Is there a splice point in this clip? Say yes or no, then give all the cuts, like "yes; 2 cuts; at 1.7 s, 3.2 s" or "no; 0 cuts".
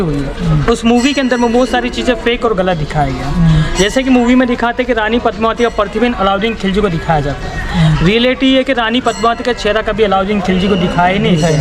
no; 0 cuts